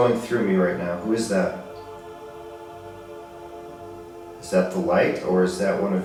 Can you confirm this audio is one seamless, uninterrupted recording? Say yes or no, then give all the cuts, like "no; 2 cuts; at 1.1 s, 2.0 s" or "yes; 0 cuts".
yes; 0 cuts